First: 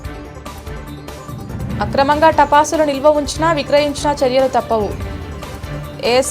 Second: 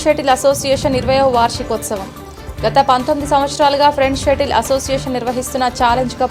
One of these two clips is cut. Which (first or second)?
first